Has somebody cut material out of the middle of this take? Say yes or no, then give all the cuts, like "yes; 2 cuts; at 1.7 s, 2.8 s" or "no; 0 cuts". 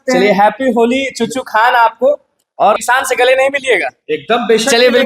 yes; 1 cut; at 2.8 s